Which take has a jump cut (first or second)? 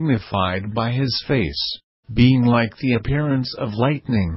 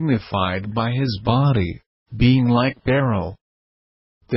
first